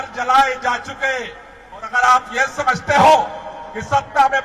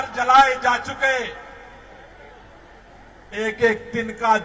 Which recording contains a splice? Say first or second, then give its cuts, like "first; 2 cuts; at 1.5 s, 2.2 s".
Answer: first; 1 cut; at 1.9 s